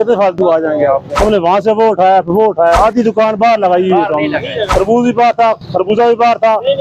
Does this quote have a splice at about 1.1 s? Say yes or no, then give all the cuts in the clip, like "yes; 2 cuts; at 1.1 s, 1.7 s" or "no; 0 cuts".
yes; 3 cuts; at 1.1 s, 2.8 s, 4.7 s